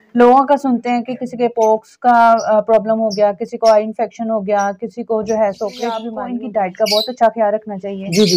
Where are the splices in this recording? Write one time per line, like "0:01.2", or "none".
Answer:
0:06.2